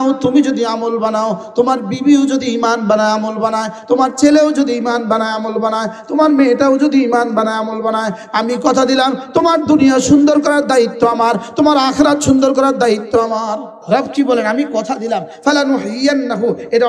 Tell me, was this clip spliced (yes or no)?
yes